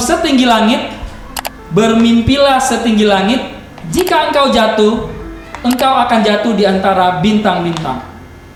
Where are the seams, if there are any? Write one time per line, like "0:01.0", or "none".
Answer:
none